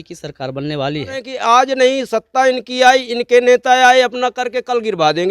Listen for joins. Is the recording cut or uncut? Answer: cut